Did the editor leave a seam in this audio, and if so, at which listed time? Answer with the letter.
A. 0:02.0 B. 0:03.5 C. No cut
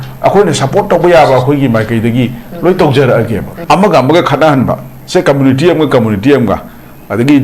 B